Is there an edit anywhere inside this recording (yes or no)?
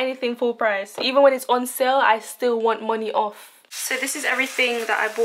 yes